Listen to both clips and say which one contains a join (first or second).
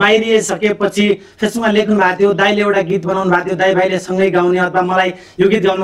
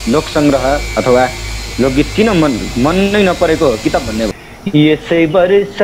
second